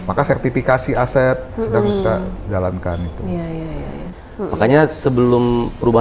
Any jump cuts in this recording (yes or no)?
yes